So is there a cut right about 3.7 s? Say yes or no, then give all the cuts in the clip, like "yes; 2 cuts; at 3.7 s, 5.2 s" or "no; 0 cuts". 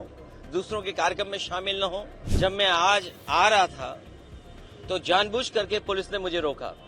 no; 1 cut; at 2.2 s